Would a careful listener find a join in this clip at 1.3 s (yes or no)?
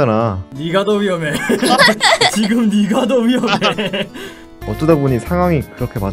no